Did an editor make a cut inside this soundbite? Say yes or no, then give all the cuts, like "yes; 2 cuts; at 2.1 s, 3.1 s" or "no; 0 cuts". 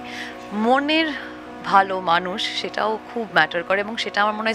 no; 0 cuts